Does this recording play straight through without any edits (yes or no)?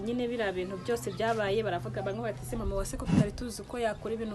yes